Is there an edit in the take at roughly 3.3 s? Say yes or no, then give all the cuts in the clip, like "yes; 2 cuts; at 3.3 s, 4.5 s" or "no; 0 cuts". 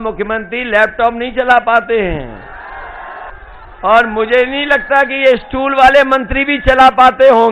yes; 1 cut; at 3.3 s